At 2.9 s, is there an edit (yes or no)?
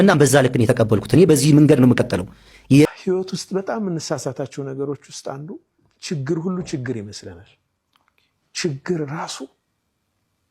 yes